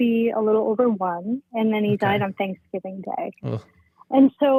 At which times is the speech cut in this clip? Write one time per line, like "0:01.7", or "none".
none